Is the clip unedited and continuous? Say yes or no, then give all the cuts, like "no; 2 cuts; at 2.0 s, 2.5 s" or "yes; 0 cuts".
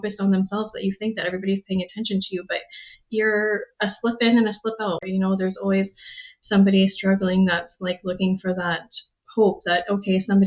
no; 1 cut; at 5.0 s